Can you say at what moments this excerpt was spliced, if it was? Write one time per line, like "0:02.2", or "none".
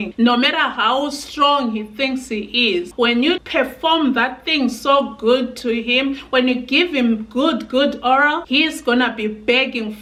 none